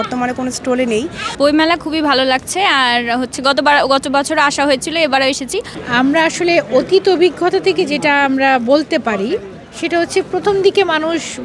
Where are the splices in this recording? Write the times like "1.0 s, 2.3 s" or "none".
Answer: 1.2 s, 5.8 s